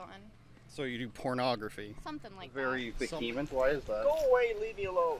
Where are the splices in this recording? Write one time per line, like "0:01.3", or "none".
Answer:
0:02.5